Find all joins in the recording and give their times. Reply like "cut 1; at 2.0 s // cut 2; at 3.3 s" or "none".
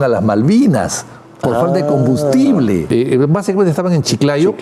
cut 1; at 2.9 s

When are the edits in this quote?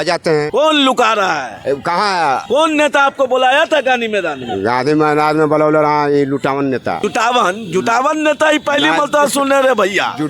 none

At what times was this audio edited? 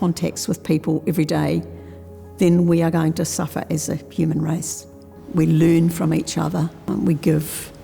cut 1; at 6.8 s

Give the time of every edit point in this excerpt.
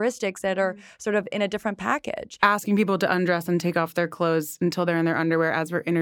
cut 1; at 2.3 s

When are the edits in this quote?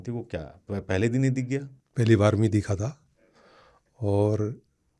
cut 1; at 1.8 s

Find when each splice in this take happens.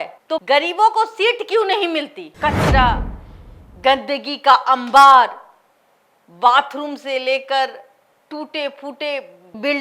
cut 1; at 2.2 s

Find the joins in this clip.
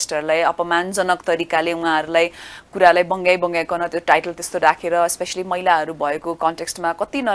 none

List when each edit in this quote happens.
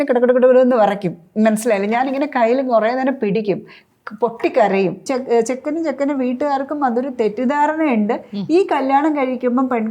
cut 1; at 5.0 s

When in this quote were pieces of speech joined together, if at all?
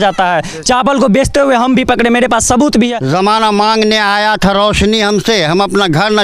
cut 1; at 3.0 s

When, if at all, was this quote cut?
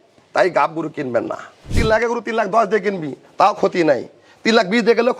cut 1; at 1.7 s

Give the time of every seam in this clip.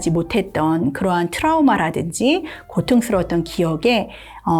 none

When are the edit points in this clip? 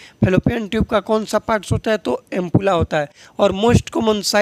none

